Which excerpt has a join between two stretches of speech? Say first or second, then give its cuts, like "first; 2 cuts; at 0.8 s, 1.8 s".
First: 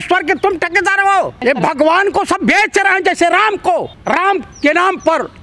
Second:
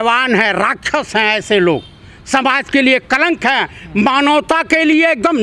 first; 2 cuts; at 1.4 s, 3.9 s